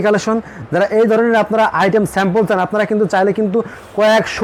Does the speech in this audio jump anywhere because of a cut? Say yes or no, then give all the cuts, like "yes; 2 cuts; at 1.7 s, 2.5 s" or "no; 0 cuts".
no; 0 cuts